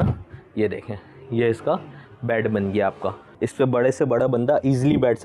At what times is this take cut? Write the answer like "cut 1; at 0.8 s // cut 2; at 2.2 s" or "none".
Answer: cut 1; at 3.4 s